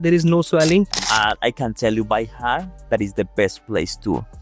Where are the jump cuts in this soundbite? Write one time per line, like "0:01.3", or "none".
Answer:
0:01.0